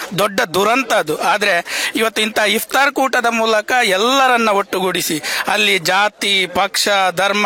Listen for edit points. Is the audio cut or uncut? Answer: uncut